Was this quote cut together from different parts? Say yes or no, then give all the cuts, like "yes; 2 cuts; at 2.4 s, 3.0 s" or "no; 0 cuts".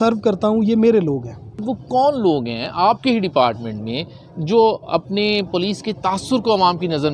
yes; 1 cut; at 1.5 s